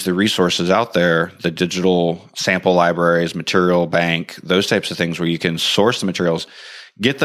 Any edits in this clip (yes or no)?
no